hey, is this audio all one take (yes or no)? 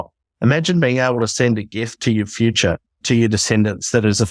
no